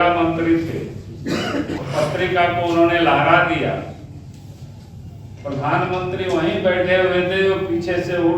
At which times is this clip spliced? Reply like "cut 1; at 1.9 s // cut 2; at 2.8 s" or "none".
cut 1; at 1.8 s